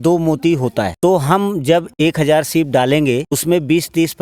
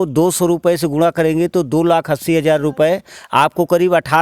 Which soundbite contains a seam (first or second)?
first